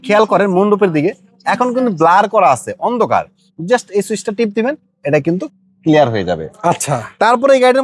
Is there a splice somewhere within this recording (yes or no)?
no